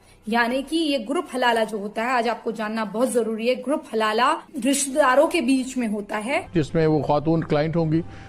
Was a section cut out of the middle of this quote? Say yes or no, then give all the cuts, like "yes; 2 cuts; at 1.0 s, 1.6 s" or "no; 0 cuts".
yes; 2 cuts; at 4.5 s, 6.5 s